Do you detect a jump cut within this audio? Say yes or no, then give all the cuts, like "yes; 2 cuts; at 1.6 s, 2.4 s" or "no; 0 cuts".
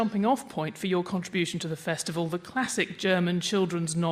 yes; 1 cut; at 1.5 s